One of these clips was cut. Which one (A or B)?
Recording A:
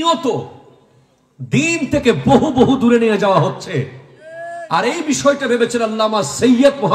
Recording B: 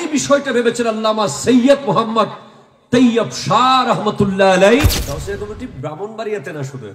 B